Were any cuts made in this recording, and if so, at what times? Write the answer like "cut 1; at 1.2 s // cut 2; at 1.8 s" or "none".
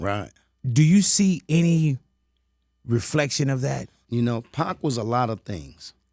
cut 1; at 4.0 s